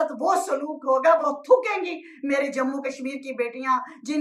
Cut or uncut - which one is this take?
cut